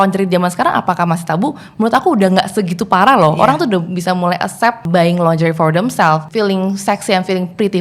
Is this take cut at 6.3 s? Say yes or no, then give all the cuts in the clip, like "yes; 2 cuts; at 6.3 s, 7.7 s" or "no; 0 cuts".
yes; 2 cuts; at 4.8 s, 6.3 s